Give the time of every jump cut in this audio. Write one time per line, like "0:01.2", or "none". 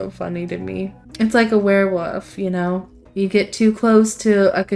0:01.0
0:03.0